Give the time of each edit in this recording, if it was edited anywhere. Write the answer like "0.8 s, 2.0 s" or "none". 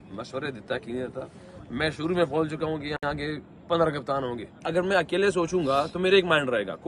4.5 s